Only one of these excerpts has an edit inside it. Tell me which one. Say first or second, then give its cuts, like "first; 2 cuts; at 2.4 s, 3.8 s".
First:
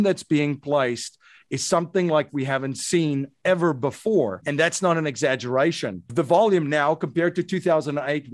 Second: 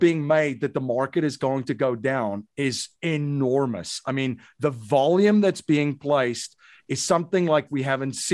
first; 2 cuts; at 4.4 s, 6.1 s